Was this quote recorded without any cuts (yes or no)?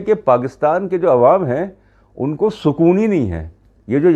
yes